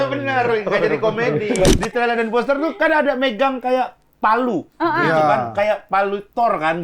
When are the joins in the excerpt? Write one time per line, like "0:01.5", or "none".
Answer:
0:01.7

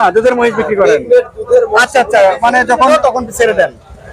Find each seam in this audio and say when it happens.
0:02.9

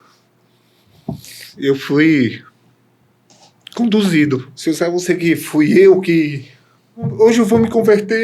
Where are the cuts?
0:01.5
0:04.5
0:07.1

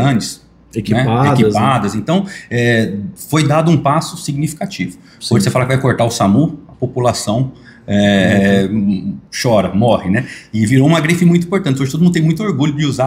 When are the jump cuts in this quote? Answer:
none

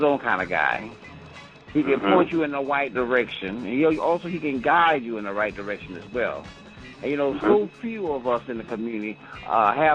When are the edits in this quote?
0:08.5

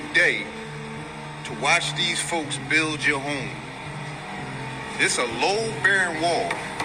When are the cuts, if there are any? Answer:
none

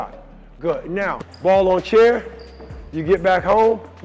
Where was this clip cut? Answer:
0:01.2

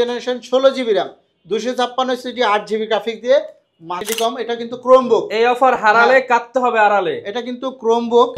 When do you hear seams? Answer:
0:04.1

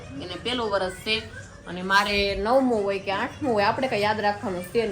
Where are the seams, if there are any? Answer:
none

